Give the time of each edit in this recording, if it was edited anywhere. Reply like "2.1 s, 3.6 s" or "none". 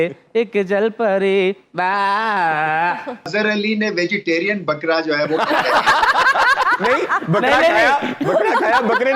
3.3 s